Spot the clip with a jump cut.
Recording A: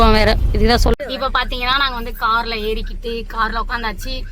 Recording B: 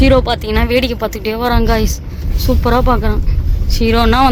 A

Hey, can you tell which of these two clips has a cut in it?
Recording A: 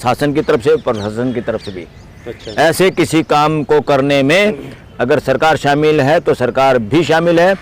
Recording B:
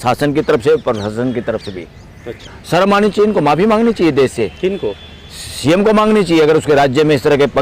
B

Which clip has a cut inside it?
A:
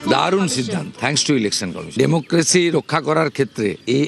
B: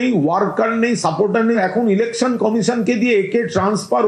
A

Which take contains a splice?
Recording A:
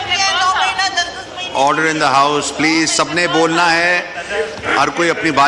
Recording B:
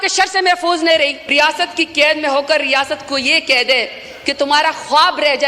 B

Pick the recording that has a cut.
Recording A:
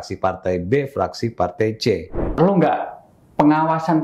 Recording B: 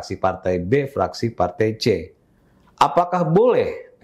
A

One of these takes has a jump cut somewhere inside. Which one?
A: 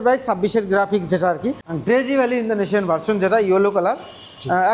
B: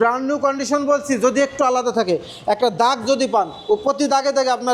A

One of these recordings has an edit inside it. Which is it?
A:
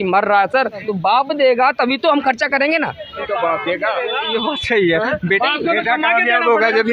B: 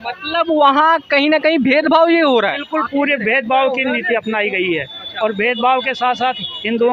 A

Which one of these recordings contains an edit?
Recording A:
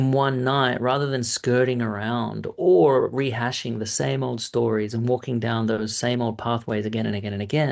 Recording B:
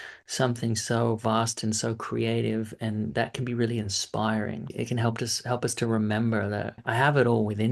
B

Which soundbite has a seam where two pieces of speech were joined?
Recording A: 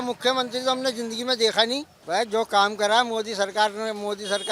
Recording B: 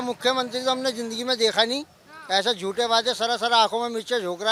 A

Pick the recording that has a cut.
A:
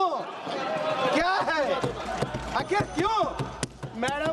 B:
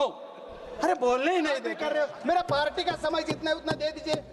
B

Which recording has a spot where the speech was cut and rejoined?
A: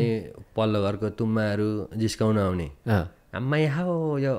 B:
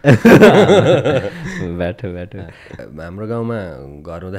B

